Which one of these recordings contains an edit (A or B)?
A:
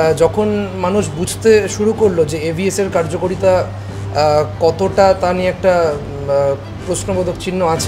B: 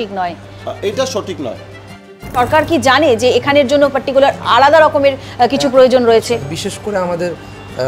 B